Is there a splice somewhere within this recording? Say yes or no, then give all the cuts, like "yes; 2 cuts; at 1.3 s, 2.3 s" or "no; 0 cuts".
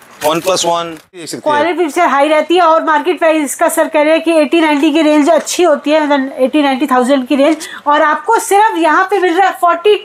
yes; 1 cut; at 1.3 s